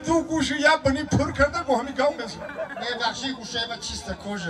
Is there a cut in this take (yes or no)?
no